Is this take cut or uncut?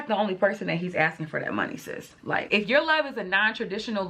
cut